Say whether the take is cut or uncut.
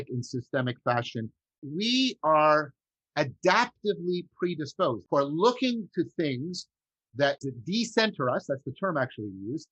cut